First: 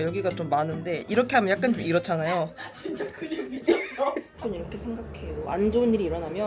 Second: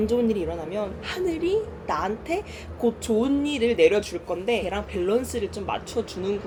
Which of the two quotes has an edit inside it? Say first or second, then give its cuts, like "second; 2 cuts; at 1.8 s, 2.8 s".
first; 1 cut; at 4.4 s